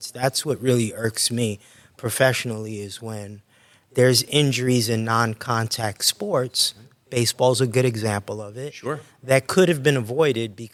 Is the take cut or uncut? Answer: uncut